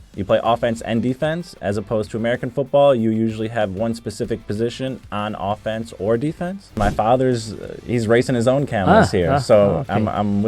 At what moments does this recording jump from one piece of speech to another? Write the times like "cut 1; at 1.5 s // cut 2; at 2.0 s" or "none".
cut 1; at 6.8 s